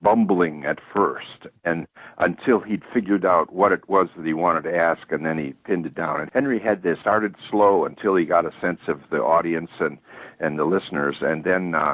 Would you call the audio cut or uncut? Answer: uncut